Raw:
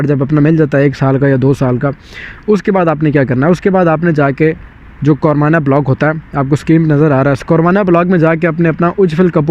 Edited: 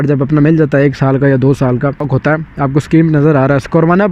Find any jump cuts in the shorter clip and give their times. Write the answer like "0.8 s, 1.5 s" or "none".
2.1 s